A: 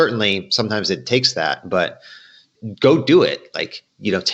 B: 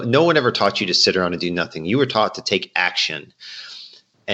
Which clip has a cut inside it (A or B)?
A